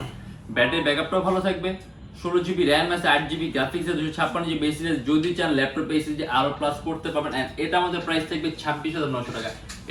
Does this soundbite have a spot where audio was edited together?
no; 0 cuts

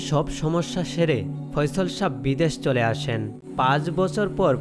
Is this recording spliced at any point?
yes; 1 cut; at 3.4 s

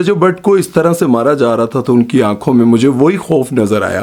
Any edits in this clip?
no; 0 cuts

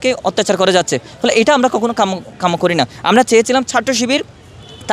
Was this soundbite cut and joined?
no; 0 cuts

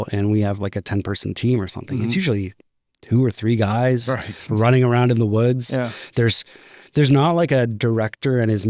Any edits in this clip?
no; 0 cuts

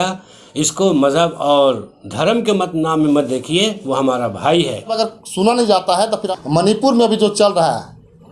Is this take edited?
yes; 2 cuts; at 4.9 s, 6.2 s

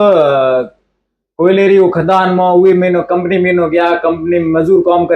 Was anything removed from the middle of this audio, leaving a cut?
no; 0 cuts

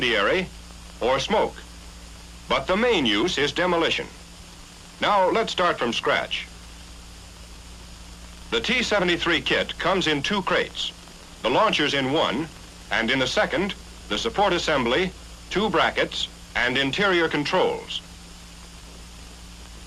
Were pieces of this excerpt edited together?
no; 0 cuts

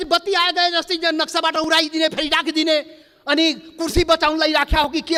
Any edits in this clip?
no; 0 cuts

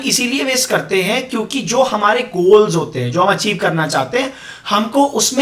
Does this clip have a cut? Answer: no; 0 cuts

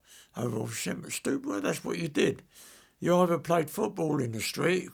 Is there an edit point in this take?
no; 0 cuts

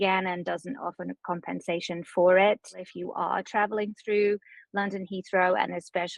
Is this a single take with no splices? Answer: no; 1 cut; at 2.9 s

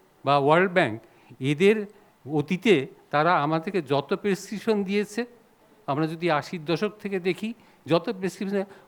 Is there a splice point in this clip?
no; 0 cuts

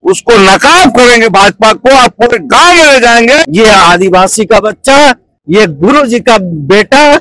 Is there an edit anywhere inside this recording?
yes; 1 cut; at 3.5 s

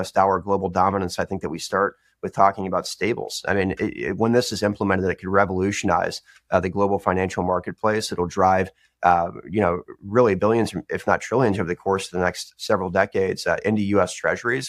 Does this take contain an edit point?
no; 0 cuts

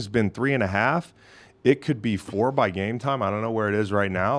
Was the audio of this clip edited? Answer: no; 0 cuts

